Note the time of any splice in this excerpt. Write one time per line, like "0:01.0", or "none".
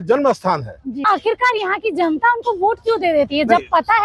0:01.0